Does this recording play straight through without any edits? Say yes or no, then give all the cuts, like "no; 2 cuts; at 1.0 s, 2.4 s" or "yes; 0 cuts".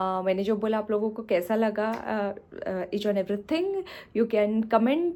yes; 0 cuts